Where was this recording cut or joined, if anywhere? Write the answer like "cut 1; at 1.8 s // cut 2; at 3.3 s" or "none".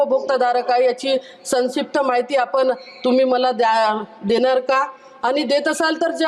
none